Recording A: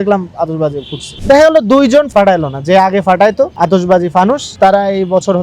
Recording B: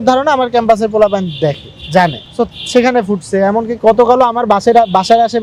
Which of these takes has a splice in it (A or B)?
A